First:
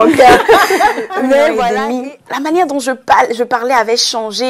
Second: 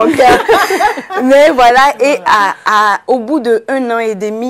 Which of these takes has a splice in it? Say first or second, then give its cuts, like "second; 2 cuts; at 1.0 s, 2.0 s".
first; 1 cut; at 1.7 s